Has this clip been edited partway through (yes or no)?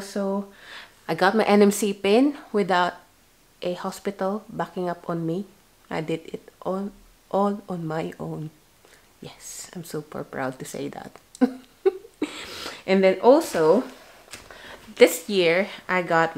no